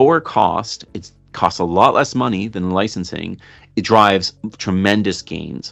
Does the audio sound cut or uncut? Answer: uncut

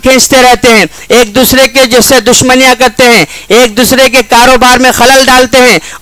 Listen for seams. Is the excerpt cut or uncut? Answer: uncut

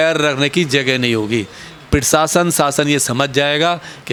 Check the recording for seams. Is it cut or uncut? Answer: uncut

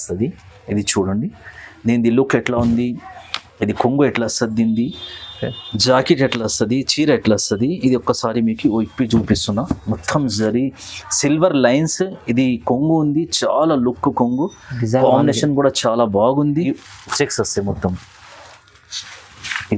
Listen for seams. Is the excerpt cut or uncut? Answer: cut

